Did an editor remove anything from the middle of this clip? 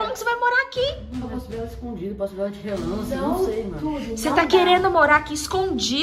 no; 0 cuts

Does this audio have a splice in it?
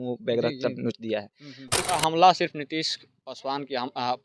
yes; 1 cut; at 1.9 s

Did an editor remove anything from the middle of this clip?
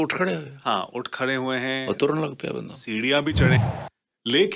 yes; 1 cut; at 3.6 s

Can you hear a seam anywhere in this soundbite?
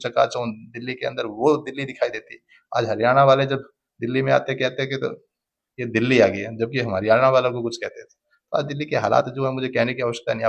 no; 0 cuts

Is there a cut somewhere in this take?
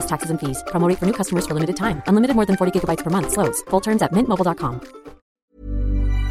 yes; 1 cut; at 5.3 s

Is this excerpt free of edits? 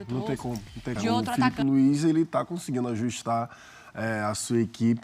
no; 1 cut; at 1.2 s

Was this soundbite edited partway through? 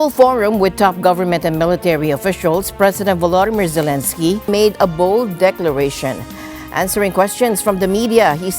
yes; 1 cut; at 4.5 s

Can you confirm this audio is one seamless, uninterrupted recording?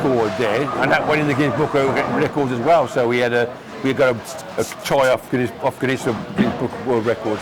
yes; 0 cuts

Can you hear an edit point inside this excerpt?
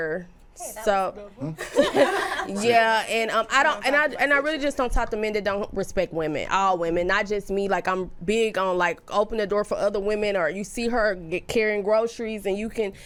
no; 0 cuts

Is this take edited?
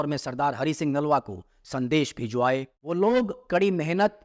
yes; 1 cut; at 2.8 s

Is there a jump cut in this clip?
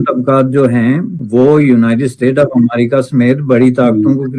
yes; 1 cut; at 1.2 s

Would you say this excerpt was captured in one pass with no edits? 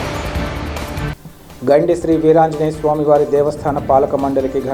no; 1 cut; at 1.1 s

